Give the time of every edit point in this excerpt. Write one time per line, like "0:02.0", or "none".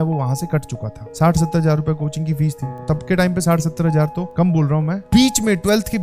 0:01.0
0:02.8
0:05.0